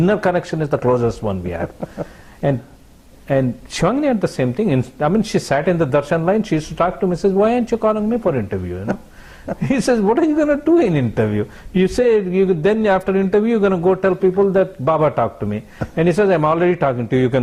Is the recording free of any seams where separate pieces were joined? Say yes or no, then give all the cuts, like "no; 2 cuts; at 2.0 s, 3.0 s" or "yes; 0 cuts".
yes; 0 cuts